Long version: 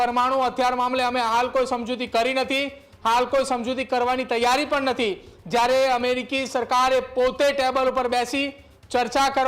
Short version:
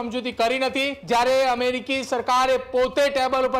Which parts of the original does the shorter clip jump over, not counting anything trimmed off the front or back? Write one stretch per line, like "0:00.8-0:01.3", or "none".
0:02.7-0:05.4